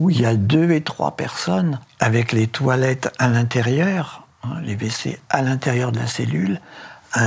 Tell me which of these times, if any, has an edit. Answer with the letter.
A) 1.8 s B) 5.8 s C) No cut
A